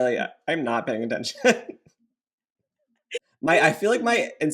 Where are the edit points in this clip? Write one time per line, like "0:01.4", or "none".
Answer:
0:03.2